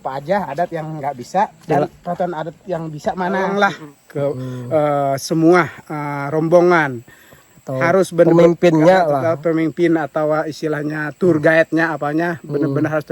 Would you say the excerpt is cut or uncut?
cut